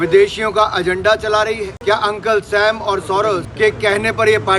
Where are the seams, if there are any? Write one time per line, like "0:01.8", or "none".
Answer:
0:01.7
0:03.5

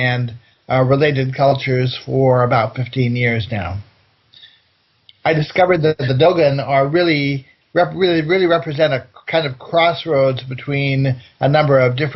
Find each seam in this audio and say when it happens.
0:03.3

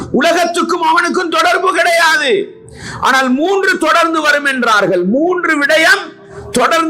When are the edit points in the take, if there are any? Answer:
none

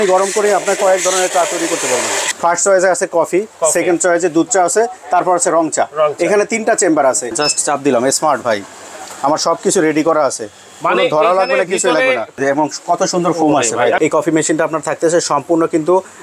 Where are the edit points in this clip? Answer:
0:02.2
0:07.3
0:12.4
0:14.0

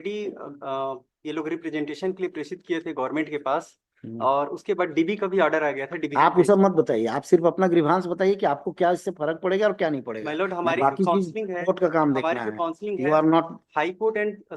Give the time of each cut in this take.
none

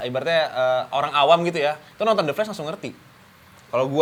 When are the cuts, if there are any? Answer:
none

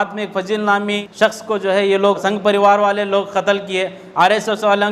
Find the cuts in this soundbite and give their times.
0:01.0
0:02.2

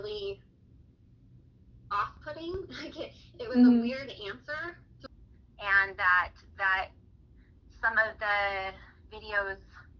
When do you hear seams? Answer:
0:05.0

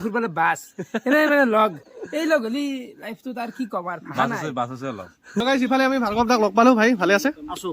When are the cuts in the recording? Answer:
0:05.4

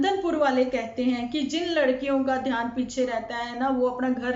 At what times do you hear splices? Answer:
none

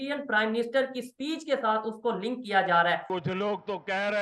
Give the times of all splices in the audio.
0:03.1

